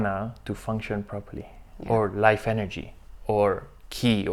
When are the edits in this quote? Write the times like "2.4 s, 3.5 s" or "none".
none